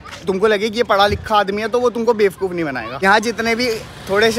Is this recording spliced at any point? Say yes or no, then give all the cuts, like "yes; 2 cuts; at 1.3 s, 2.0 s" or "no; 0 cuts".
no; 0 cuts